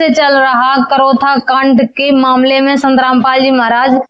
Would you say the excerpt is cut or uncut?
uncut